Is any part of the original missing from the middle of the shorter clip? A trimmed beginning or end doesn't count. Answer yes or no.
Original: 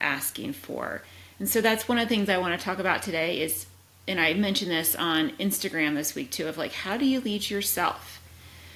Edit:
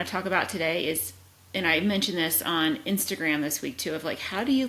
no